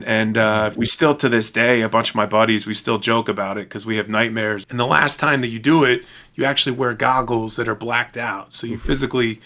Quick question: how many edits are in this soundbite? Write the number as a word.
one